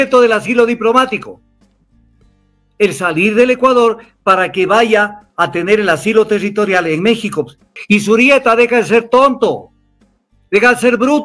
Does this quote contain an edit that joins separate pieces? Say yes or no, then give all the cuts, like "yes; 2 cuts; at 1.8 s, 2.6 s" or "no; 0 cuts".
yes; 1 cut; at 7.7 s